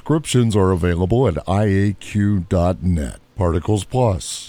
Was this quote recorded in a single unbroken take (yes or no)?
no